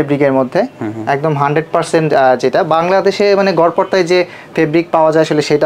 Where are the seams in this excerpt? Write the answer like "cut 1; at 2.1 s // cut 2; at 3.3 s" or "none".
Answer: none